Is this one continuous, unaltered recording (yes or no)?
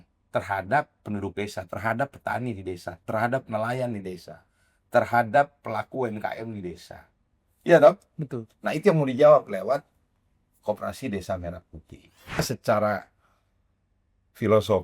no